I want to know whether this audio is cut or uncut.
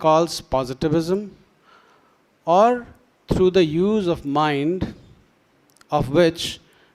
uncut